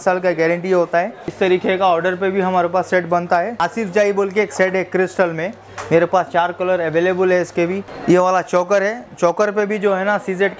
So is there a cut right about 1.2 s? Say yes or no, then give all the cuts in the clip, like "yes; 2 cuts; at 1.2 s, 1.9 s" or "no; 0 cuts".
yes; 4 cuts; at 1.2 s, 3.6 s, 5.7 s, 7.9 s